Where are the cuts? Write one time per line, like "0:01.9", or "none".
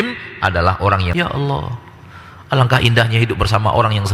0:01.1

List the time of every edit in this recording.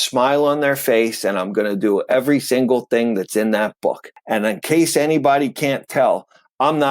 0:04.1

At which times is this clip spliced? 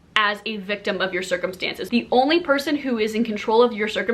0:01.7

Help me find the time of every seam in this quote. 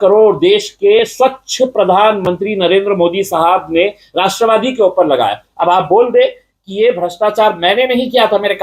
none

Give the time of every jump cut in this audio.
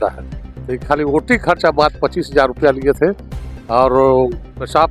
none

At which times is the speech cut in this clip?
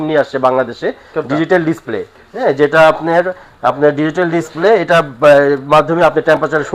none

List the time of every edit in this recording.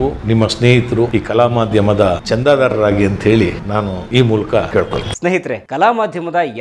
none

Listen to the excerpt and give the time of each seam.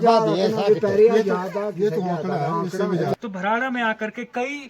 0:03.1

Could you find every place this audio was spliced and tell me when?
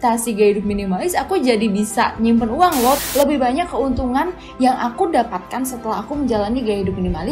0:03.0

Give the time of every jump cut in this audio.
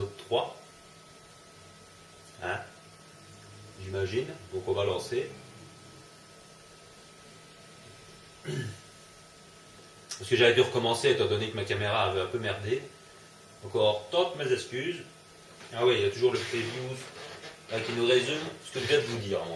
none

